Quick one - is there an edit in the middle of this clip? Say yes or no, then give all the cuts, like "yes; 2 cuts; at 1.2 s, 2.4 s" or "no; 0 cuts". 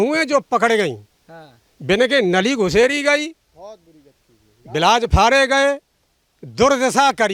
no; 0 cuts